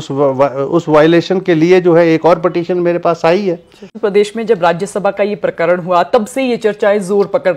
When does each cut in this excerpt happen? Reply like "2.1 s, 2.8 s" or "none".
3.9 s